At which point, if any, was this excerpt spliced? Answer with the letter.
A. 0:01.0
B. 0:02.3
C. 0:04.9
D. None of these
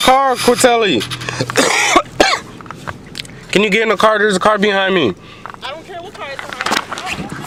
D